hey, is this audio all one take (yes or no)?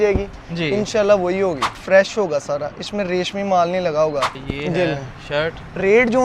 no